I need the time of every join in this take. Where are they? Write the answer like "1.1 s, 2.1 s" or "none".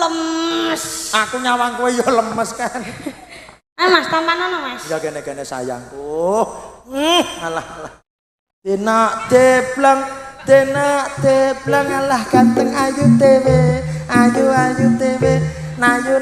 none